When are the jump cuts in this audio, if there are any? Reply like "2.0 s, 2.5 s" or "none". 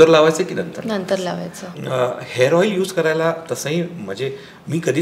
1.6 s